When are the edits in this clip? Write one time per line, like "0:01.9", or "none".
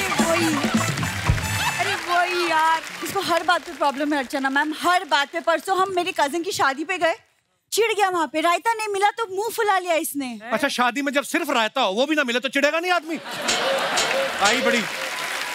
0:03.0